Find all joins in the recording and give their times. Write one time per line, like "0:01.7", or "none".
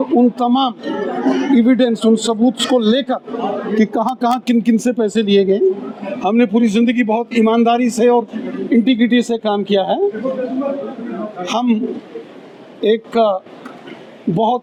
none